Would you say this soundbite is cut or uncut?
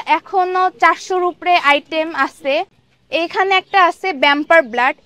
cut